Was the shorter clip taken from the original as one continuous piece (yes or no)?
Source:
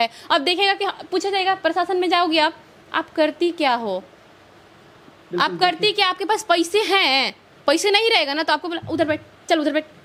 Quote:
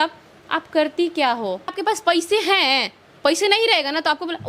no